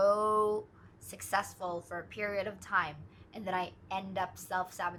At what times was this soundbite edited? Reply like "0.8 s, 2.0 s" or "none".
none